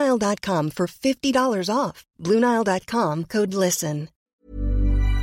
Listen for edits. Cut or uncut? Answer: cut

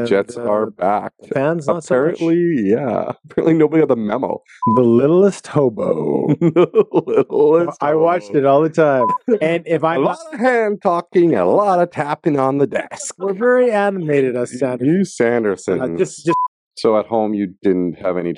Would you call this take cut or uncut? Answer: cut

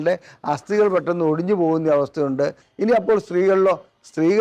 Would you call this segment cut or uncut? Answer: cut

